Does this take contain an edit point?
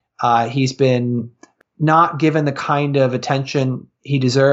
yes; 1 cut; at 1.3 s

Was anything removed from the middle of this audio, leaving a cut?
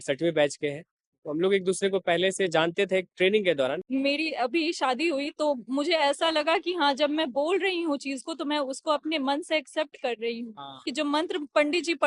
yes; 2 cuts; at 3.8 s, 10.9 s

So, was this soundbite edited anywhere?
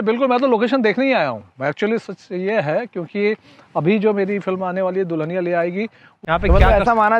yes; 1 cut; at 6.1 s

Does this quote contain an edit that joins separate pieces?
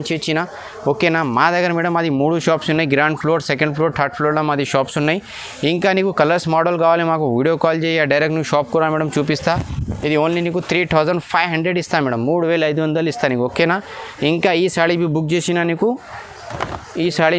no; 0 cuts

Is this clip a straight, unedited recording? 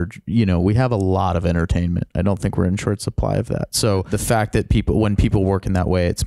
no; 1 cut; at 4.1 s

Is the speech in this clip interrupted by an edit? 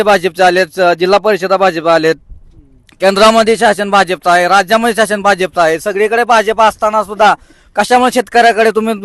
no; 0 cuts

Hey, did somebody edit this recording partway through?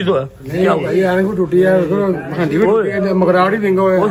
no; 0 cuts

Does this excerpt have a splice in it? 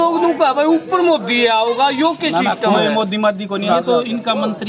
yes; 1 cut; at 3.5 s

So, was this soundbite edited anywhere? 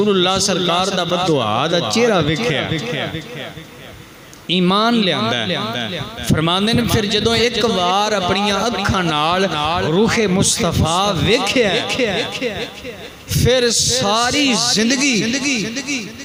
no; 0 cuts

